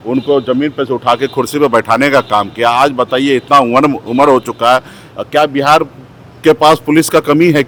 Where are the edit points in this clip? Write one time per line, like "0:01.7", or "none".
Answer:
none

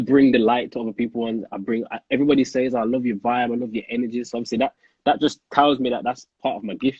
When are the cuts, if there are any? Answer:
none

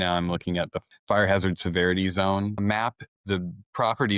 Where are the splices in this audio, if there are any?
0:01.1
0:02.7

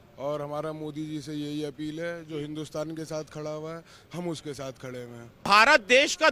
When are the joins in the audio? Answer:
0:05.4

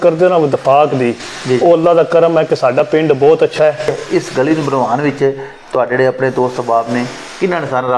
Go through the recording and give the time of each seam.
0:04.0

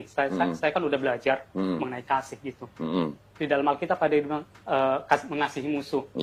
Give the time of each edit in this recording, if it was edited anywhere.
none

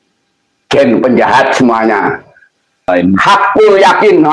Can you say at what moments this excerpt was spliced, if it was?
0:02.9

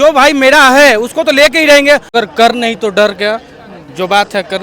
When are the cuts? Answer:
0:02.1

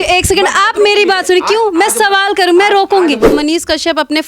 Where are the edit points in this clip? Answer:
0:03.3

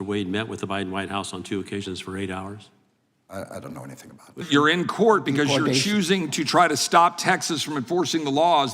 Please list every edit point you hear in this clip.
0:04.4

